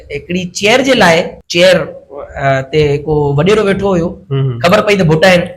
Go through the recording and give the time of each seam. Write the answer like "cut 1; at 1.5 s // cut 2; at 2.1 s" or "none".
cut 1; at 1.4 s